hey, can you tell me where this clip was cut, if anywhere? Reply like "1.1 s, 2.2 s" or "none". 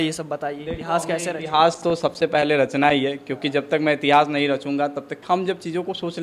5.2 s